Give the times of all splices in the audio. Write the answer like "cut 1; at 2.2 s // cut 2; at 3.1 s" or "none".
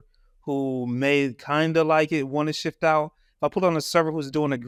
none

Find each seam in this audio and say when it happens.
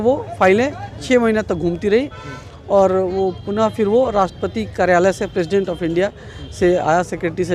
none

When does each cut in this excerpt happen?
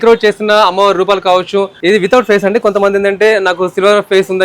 cut 1; at 1.7 s

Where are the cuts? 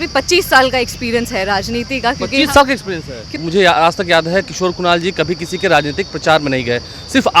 cut 1; at 3.3 s

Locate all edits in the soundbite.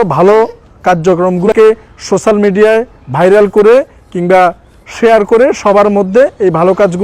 cut 1; at 1.5 s

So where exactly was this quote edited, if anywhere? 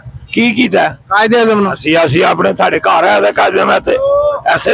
none

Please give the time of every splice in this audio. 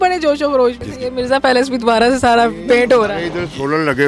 cut 1; at 0.9 s

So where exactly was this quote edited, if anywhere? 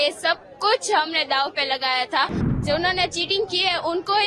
cut 1; at 2.6 s

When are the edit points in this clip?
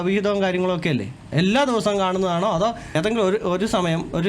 cut 1; at 1.3 s // cut 2; at 2.9 s

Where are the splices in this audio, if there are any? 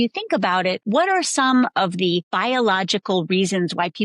cut 1; at 0.8 s // cut 2; at 2.3 s

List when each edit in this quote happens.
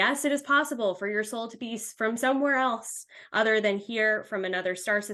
none

